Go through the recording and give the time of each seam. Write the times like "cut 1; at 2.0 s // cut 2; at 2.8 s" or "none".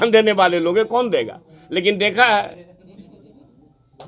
none